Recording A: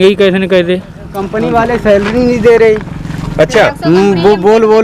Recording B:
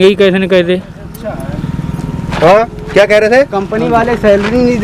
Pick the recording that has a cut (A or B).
A